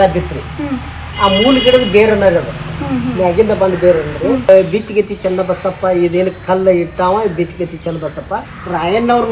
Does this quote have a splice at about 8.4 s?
yes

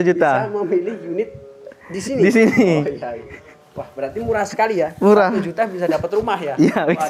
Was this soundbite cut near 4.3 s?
no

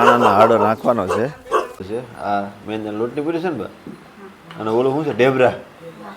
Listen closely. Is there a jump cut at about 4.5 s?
no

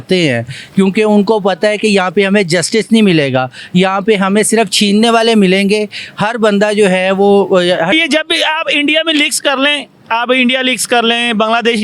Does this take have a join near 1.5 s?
no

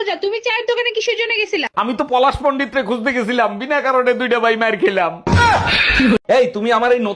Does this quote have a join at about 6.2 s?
yes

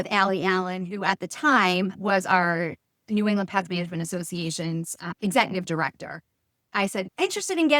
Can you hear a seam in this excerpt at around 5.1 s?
yes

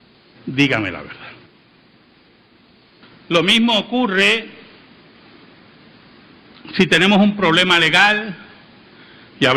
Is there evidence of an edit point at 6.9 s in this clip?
no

